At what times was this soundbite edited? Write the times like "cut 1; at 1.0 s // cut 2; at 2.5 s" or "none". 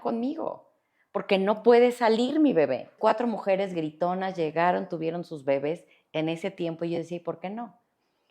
cut 1; at 2.9 s